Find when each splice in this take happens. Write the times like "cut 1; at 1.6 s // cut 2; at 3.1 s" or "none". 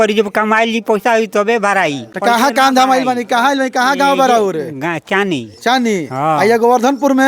none